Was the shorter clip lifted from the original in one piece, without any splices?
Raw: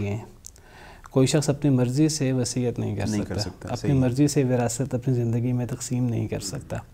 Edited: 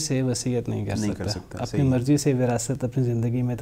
yes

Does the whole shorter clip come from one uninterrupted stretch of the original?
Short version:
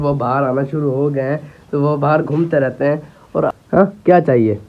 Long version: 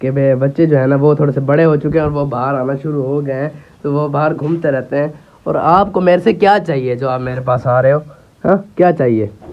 no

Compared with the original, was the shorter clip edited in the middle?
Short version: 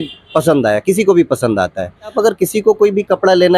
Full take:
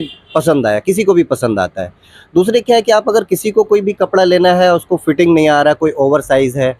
yes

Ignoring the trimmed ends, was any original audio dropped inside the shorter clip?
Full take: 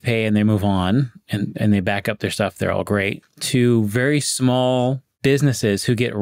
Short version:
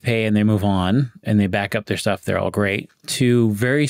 yes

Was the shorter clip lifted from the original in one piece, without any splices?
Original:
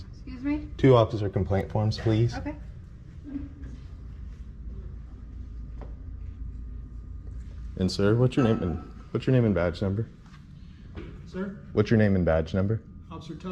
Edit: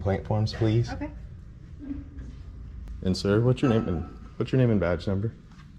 no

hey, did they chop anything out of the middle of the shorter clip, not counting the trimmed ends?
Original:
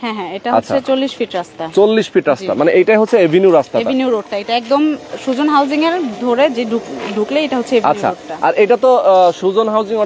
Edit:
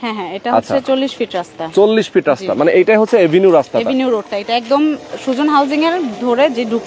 no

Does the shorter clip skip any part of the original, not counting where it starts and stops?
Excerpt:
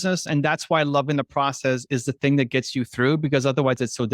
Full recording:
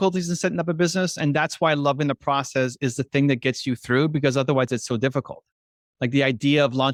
no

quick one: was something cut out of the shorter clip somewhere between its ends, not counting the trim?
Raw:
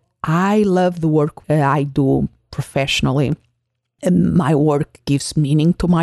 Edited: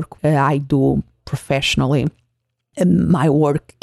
no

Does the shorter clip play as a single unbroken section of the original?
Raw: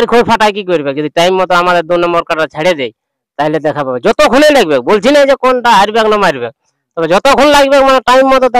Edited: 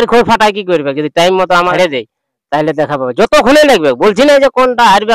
no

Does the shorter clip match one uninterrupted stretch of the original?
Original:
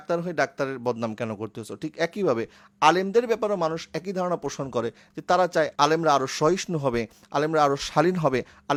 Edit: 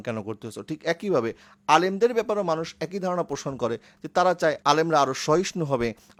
yes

